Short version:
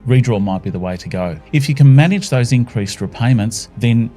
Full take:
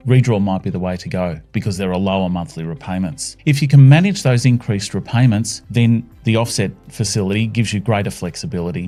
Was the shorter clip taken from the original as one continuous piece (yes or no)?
no